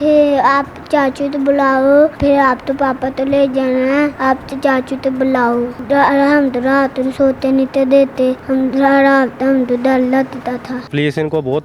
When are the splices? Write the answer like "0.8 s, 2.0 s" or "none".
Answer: 2.2 s, 4.2 s, 5.8 s, 8.4 s, 10.9 s